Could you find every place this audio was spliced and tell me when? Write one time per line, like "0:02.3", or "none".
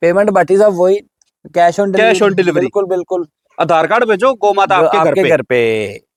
none